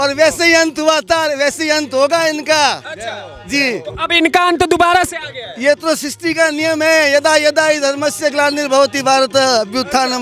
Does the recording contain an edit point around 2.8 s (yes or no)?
no